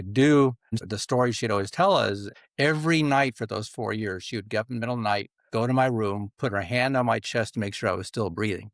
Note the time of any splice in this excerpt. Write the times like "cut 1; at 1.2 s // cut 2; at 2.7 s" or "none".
cut 1; at 0.8 s // cut 2; at 2.4 s